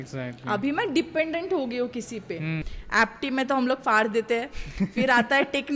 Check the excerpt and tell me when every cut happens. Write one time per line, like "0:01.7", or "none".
0:02.6

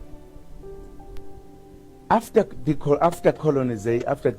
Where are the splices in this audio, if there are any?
0:03.2

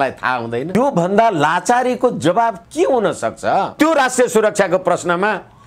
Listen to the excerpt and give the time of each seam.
0:00.8
0:03.7

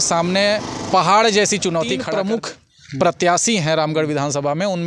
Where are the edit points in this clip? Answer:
0:02.0

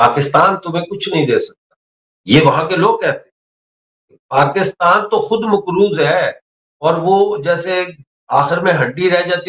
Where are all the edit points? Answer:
none

